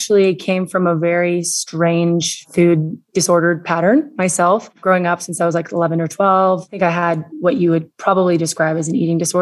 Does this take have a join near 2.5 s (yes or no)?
yes